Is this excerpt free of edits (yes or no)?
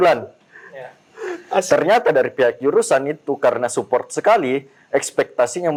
yes